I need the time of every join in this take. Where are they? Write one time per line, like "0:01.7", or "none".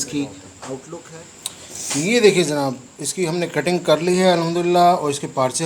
0:01.0